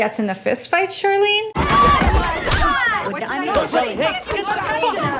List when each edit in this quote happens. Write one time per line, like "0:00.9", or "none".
none